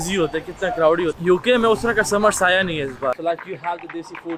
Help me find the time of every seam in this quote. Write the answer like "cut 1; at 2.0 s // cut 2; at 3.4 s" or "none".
cut 1; at 1.2 s // cut 2; at 3.2 s